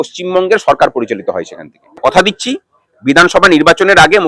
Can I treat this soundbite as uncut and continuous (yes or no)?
no